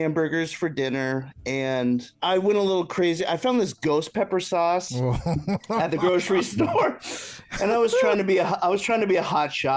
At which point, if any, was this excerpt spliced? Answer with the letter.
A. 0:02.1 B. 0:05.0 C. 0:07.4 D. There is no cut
A